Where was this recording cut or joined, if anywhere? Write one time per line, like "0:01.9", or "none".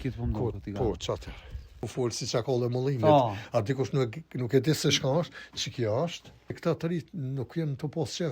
0:01.8
0:06.6